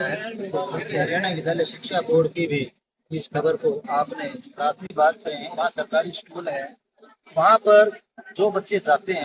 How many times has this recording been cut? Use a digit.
1